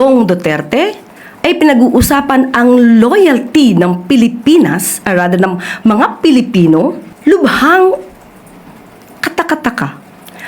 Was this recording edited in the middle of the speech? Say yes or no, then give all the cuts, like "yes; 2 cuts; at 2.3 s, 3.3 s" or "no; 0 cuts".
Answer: yes; 1 cut; at 7.1 s